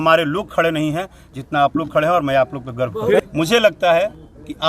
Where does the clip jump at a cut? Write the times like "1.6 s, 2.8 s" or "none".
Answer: 3.2 s